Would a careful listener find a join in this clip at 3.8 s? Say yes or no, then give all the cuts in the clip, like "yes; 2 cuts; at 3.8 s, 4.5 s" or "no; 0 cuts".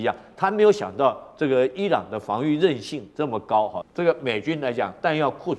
yes; 1 cut; at 3.8 s